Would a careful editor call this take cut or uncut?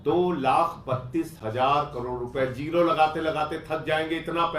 uncut